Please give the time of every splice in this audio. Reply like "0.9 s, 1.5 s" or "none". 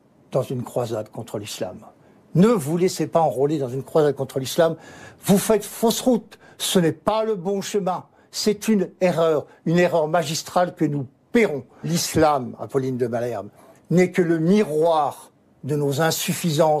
11.9 s